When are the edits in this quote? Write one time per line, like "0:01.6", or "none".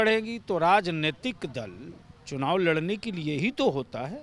none